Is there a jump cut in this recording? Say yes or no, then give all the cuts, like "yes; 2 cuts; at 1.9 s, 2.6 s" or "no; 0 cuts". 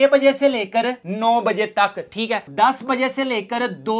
yes; 1 cut; at 2.5 s